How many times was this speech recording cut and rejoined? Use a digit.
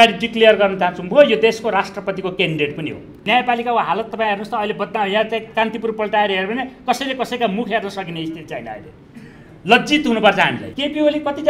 2